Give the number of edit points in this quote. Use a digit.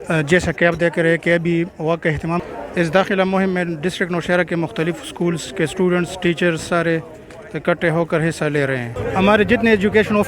2